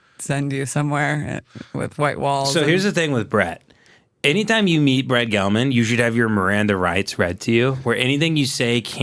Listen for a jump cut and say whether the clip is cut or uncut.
cut